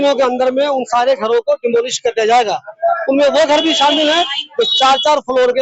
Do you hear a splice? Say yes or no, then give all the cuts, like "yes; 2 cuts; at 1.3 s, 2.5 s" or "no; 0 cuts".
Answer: no; 0 cuts